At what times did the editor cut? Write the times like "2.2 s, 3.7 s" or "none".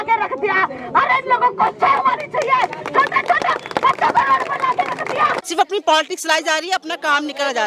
5.5 s